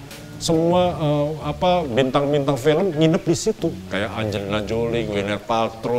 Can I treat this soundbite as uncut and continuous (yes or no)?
no